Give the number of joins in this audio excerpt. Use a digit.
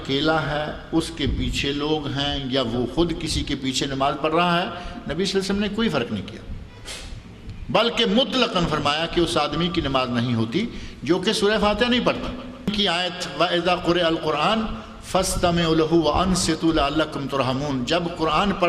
1